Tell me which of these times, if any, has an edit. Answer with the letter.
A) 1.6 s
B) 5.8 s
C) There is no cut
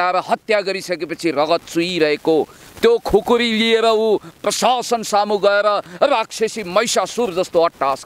C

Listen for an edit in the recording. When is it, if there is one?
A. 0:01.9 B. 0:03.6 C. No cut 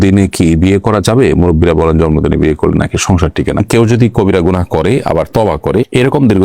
B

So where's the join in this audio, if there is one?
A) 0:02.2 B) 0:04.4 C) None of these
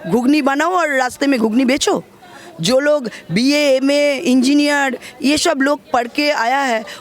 C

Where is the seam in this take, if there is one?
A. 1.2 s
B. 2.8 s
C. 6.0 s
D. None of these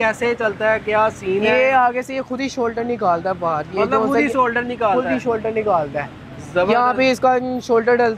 D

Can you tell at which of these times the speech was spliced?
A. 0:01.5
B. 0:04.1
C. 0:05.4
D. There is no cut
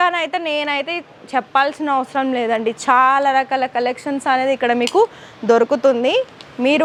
D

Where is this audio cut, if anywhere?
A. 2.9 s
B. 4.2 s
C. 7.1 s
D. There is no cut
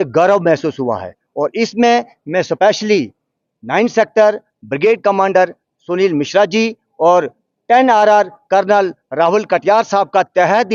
D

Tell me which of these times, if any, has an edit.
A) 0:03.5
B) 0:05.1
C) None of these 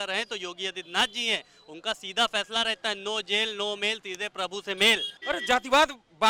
B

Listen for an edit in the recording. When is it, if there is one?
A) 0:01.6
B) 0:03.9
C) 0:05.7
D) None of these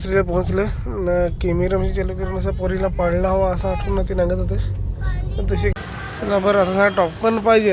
C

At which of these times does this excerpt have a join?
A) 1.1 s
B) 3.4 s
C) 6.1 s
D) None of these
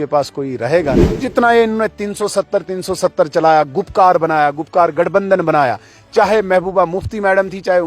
A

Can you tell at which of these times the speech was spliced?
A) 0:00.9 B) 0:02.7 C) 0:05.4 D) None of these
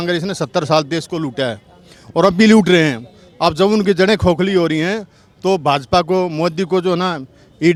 D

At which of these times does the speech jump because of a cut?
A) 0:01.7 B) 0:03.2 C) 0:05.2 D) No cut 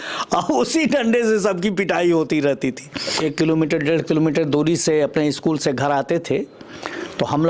B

